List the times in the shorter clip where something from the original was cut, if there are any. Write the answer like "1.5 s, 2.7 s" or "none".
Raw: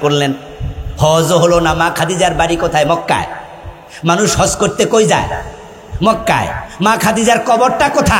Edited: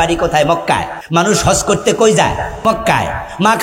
0.9 s, 2.5 s